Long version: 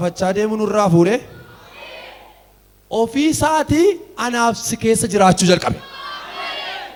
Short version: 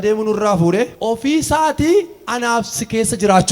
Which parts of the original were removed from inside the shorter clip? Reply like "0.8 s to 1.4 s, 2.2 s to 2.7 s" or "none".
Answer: 1.3 s to 2.9 s